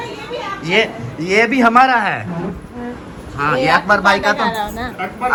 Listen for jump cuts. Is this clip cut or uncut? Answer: uncut